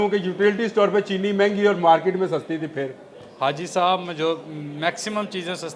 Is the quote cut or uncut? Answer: uncut